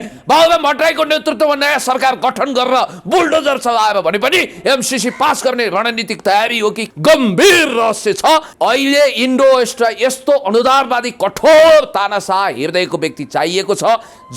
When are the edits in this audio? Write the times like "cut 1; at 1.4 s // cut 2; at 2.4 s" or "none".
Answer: cut 1; at 6.8 s // cut 2; at 8.5 s